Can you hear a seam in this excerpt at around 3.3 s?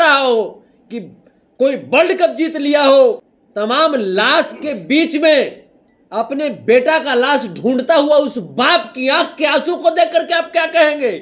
yes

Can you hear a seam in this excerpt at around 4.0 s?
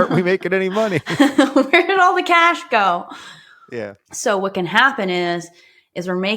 yes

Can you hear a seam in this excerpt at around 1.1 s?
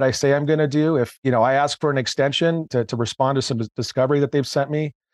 yes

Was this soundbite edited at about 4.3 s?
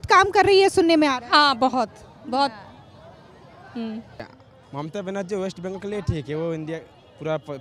yes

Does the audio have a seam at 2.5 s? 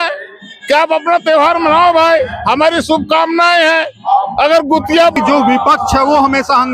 no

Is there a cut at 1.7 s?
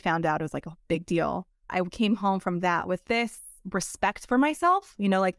yes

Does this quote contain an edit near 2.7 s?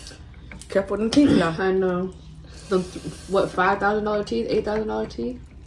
no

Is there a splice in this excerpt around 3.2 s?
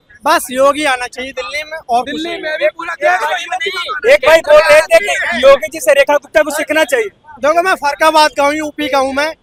no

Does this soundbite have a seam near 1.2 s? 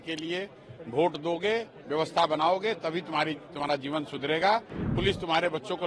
no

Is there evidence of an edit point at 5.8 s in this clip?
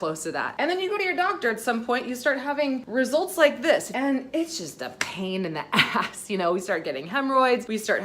no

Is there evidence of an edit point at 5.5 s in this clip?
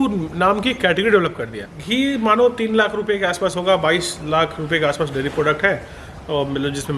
no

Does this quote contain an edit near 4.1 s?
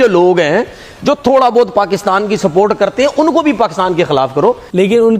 yes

